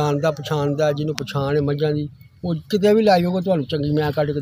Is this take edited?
no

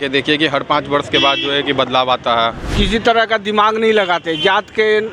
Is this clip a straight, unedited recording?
no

